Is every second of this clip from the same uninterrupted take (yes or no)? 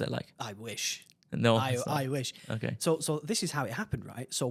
yes